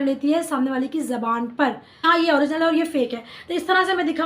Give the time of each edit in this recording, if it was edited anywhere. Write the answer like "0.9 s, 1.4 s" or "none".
2.1 s